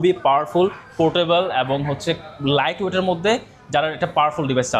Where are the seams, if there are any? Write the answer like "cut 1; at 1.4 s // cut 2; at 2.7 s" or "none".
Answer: none